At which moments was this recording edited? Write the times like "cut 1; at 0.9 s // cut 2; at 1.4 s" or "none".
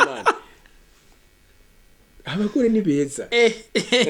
none